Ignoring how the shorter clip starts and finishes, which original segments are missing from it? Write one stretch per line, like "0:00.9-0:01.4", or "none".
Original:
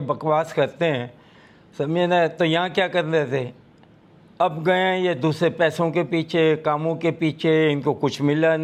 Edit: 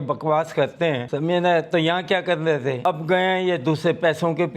0:01.1-0:01.7
0:03.5-0:04.4